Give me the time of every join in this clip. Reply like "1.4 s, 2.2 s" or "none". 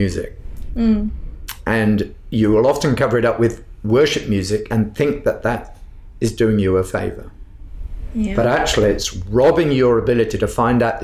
none